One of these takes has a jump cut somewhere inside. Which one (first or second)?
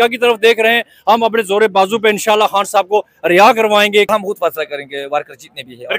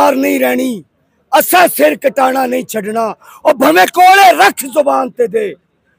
first